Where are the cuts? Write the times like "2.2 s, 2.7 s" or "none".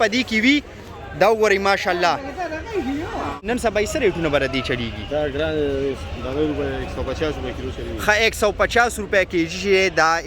3.4 s